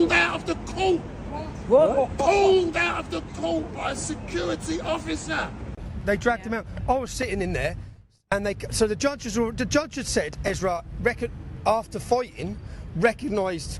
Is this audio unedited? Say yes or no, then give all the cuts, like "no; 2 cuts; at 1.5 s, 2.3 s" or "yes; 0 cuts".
no; 1 cut; at 5.9 s